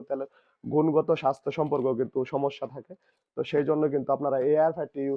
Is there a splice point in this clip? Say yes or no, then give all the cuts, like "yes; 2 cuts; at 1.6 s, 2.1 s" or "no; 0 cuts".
no; 0 cuts